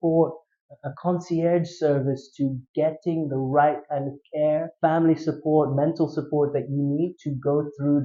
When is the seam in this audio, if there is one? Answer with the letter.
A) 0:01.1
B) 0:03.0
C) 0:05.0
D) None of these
D